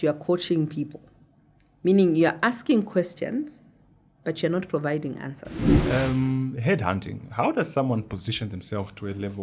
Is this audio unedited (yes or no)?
no